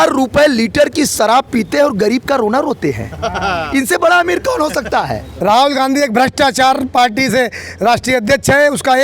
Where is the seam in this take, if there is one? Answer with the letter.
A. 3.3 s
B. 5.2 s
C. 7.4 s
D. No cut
B